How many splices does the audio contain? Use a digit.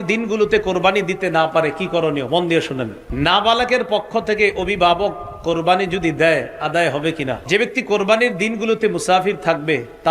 2